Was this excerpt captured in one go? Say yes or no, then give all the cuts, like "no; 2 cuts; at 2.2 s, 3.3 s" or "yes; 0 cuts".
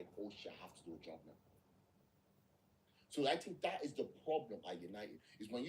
no; 1 cut; at 3.9 s